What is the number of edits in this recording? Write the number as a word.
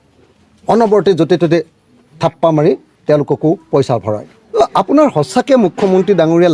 one